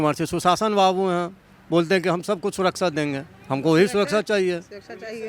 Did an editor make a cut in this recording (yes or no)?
no